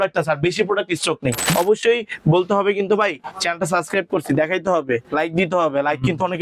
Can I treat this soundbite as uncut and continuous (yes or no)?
no